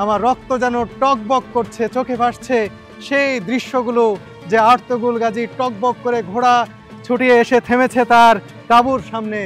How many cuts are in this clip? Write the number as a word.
zero